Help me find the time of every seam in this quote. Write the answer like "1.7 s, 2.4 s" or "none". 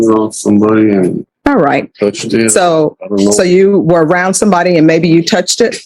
1.3 s